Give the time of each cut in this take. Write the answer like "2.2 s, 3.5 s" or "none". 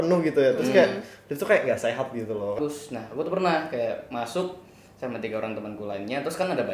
2.6 s